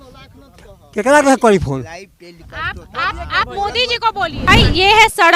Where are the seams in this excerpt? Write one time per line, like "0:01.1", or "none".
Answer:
0:04.5